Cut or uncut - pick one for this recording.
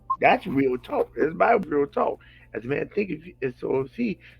cut